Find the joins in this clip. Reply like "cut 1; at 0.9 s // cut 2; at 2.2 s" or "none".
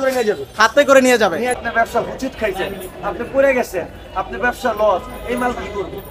cut 1; at 1.6 s